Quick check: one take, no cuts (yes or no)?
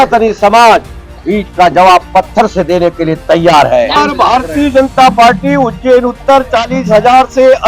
no